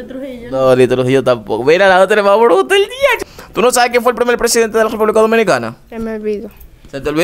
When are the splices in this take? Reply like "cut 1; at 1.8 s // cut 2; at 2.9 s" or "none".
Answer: cut 1; at 3.2 s